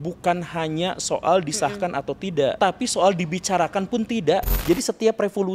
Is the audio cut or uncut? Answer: cut